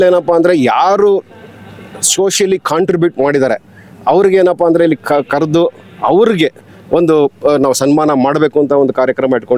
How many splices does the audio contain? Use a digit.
0